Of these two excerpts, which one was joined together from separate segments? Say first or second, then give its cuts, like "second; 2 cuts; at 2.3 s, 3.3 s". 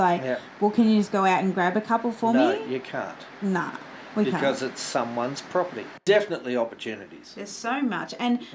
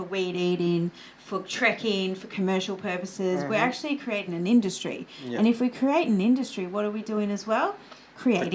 first; 1 cut; at 6.0 s